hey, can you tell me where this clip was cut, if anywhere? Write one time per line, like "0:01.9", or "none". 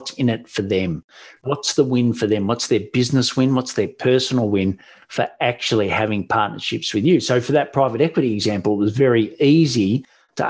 none